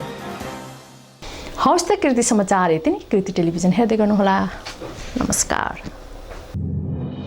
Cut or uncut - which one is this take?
uncut